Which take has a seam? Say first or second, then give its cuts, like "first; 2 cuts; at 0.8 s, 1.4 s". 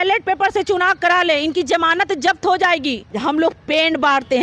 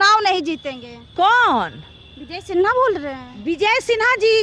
first; 1 cut; at 3.1 s